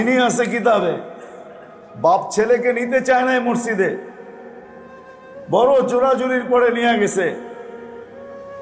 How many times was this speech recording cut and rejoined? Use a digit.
1